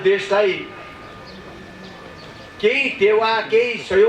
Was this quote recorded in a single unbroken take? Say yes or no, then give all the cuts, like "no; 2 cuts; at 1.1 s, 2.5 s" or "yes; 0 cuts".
yes; 0 cuts